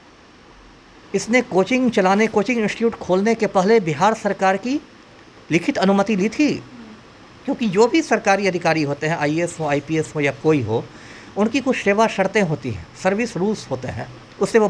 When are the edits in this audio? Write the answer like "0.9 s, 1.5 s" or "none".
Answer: none